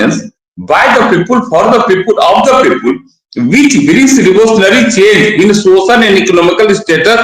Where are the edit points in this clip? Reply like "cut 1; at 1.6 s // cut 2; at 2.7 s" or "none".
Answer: none